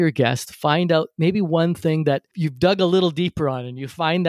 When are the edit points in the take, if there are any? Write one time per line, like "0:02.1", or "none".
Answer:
0:02.4